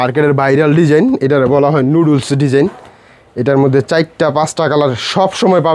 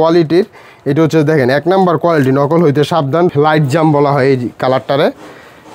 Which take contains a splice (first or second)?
second